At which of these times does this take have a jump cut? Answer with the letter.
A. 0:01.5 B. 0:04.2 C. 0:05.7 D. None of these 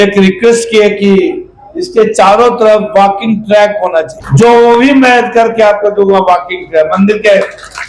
B